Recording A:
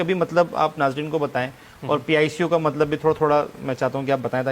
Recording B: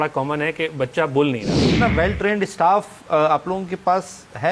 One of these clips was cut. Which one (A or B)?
B